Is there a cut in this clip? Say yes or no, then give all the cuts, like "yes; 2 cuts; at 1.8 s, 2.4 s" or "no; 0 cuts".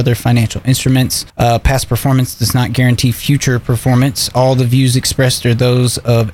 yes; 1 cut; at 1.2 s